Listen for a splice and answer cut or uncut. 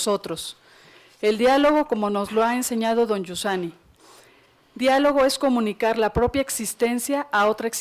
uncut